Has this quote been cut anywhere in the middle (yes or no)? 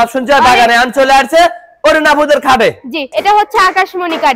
yes